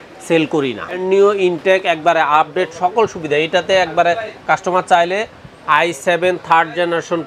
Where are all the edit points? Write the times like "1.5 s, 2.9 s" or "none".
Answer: 1.0 s

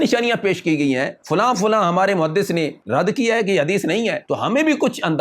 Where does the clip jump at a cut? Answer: 1.2 s, 2.8 s, 4.2 s

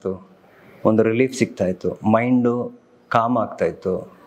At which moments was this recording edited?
none

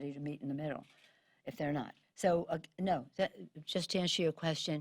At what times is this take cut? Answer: 2.0 s

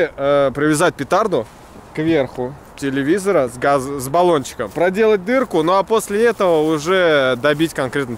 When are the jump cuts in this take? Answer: 4.6 s

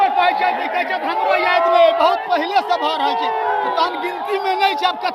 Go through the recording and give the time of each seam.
none

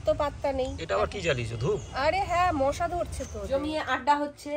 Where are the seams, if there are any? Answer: 3.4 s

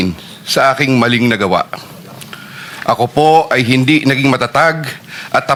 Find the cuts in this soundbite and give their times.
none

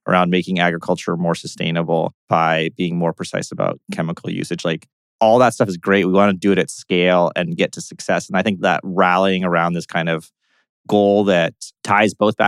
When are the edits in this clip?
2.2 s

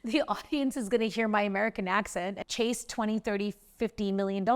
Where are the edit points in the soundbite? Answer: 2.3 s

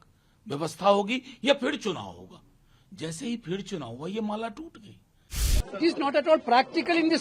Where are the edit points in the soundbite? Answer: 5.5 s

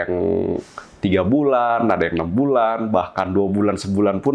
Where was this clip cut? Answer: none

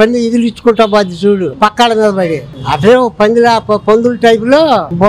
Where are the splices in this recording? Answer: none

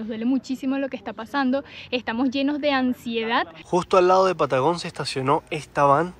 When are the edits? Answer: 3.6 s

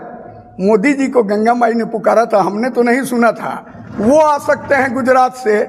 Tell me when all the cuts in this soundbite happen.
none

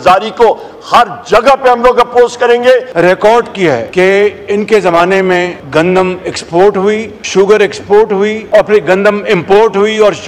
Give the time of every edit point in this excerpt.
2.9 s, 3.9 s, 5.6 s, 7.1 s, 8.4 s

